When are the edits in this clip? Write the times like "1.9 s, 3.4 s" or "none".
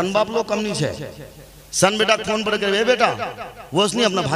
none